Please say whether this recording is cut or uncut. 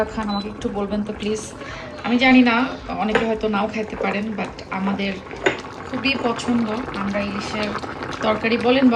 uncut